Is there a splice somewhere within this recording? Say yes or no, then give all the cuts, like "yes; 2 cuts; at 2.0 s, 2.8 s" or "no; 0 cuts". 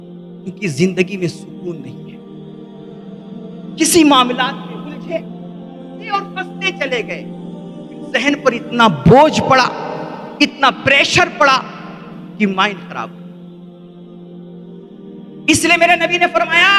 yes; 4 cuts; at 1.8 s, 3.6 s, 13.4 s, 15.3 s